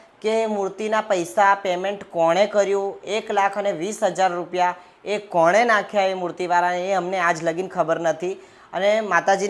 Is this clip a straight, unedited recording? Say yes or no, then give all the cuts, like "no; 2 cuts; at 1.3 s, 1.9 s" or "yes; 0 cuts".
yes; 0 cuts